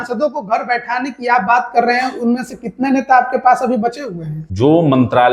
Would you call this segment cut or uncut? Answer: cut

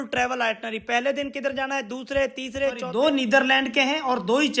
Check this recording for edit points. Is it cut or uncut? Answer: cut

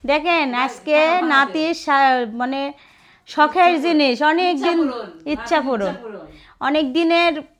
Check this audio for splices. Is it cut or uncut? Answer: uncut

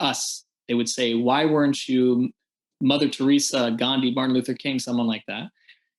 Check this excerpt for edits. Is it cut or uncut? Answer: uncut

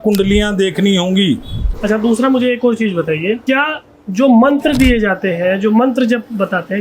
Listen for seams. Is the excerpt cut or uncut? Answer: cut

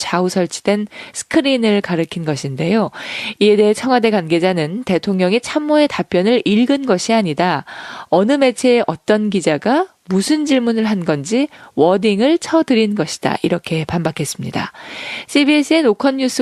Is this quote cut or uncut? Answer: uncut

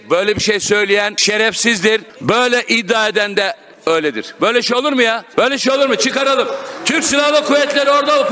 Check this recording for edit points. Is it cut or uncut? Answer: cut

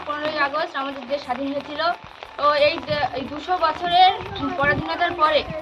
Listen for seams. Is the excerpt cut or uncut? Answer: uncut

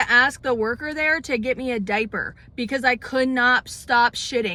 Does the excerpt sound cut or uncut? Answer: uncut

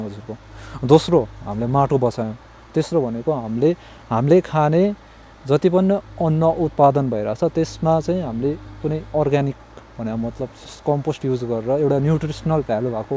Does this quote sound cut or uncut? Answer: uncut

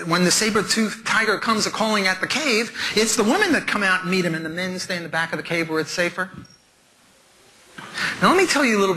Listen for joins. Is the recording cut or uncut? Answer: uncut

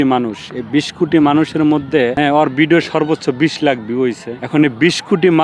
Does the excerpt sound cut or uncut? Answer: cut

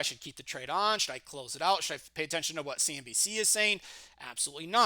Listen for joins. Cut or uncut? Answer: uncut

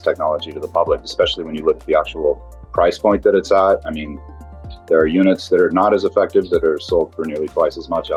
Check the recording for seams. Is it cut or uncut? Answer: uncut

